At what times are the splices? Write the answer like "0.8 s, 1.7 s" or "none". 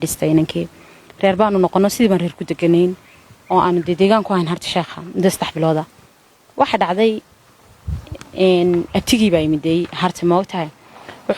none